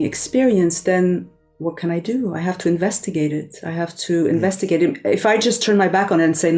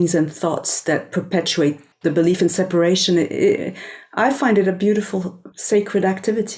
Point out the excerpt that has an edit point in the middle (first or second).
second